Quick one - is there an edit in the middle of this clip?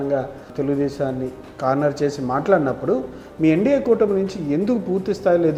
no; 0 cuts

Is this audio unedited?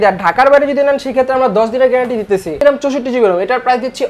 no; 1 cut; at 2.6 s

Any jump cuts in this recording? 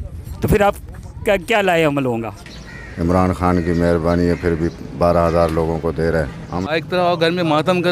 yes; 2 cuts; at 2.4 s, 6.6 s

